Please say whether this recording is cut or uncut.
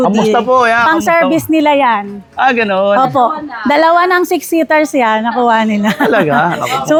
uncut